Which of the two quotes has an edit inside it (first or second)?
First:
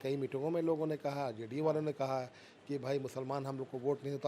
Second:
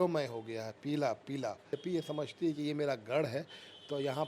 second